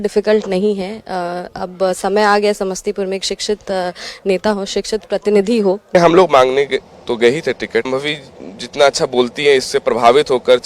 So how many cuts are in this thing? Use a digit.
2